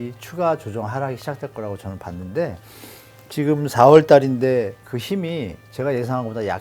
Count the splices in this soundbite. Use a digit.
1